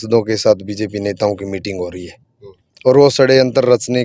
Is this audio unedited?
yes; 0 cuts

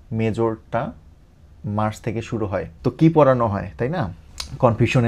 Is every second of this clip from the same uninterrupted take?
yes; 0 cuts

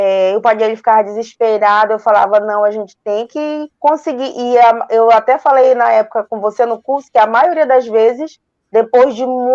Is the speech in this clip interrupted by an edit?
no; 0 cuts

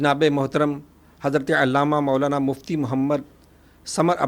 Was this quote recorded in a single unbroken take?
yes; 0 cuts

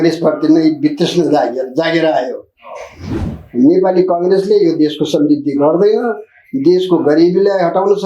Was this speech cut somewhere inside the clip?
yes; 1 cut; at 3.1 s

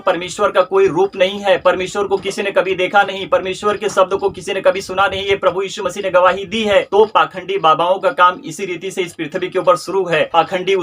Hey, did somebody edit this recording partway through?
yes; 1 cut; at 6.9 s

